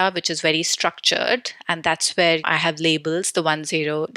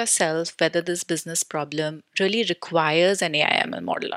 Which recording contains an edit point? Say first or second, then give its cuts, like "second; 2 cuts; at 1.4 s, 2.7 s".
first; 1 cut; at 2.4 s